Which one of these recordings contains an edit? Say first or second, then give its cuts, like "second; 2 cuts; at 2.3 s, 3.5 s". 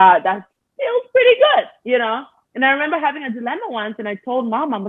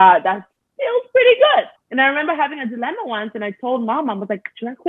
second; 1 cut; at 1.8 s